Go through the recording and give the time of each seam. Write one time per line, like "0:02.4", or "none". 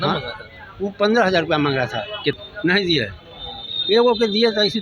0:02.4